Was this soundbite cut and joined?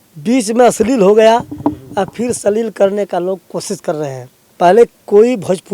no; 0 cuts

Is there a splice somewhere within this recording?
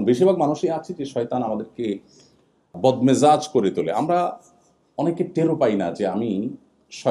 yes; 1 cut; at 2.7 s

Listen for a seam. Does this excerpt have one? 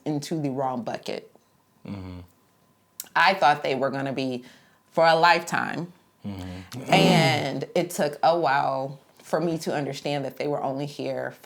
no; 0 cuts

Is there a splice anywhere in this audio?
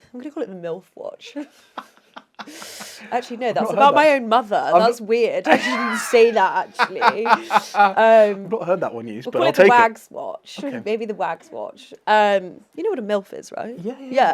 no; 0 cuts

